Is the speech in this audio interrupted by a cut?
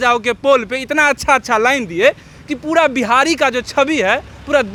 no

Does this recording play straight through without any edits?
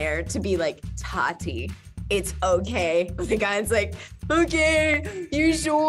no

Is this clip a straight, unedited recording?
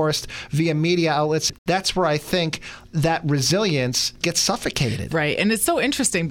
no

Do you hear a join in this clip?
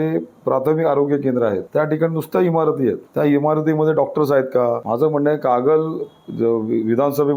yes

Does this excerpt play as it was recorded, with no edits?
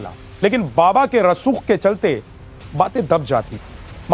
yes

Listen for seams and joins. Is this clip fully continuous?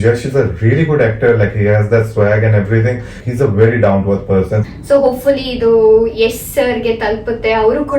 no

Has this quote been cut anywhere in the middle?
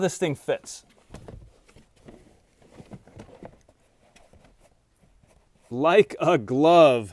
no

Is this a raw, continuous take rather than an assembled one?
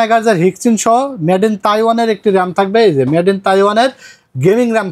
yes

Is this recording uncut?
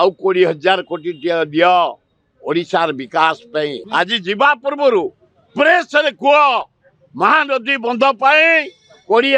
no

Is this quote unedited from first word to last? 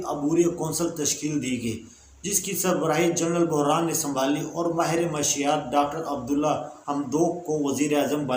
yes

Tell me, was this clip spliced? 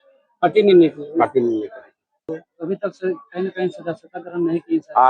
yes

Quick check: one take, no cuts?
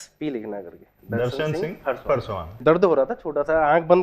no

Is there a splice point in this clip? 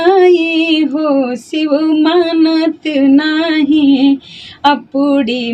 no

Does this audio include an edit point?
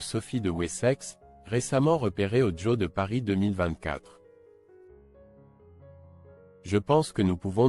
yes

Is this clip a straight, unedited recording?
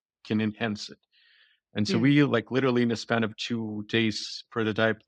yes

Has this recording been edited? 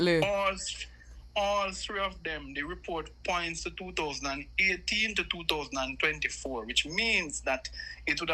no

